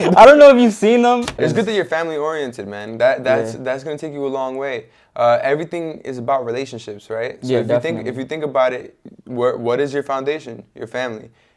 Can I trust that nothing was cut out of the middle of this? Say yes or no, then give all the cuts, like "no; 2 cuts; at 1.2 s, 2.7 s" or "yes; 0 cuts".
no; 1 cut; at 1.3 s